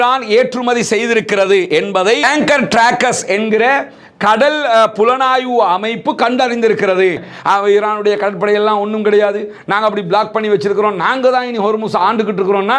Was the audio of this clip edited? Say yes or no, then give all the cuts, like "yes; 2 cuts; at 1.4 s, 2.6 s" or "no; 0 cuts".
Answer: yes; 1 cut; at 7.3 s